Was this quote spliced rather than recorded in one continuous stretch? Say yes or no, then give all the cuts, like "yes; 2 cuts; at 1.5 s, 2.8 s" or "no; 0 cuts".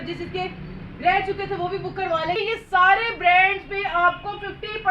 yes; 1 cut; at 2.4 s